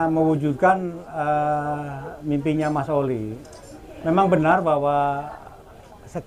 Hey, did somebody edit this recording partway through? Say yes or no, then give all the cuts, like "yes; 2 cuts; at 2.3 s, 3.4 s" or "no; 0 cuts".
no; 0 cuts